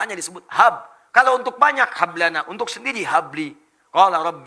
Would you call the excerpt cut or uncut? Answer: uncut